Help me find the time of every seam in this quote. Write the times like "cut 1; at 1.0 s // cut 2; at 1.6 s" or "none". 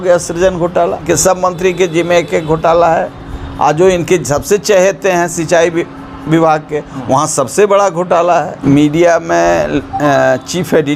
cut 1; at 1.0 s // cut 2; at 8.5 s